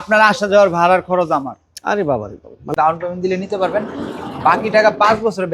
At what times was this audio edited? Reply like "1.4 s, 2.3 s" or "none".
2.7 s